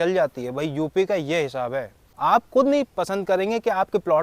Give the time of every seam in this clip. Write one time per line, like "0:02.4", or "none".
0:02.0